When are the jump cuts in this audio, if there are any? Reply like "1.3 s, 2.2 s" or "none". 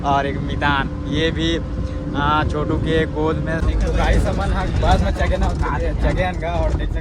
3.6 s